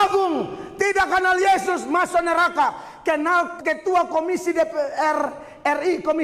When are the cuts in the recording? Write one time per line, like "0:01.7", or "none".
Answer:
0:03.5